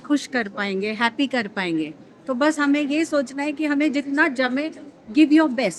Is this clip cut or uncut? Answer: uncut